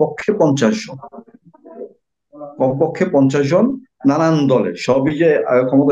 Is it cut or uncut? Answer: uncut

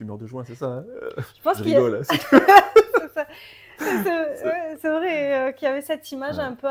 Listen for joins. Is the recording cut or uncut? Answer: uncut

